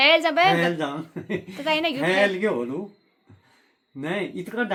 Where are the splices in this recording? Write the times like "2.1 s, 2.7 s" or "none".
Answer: none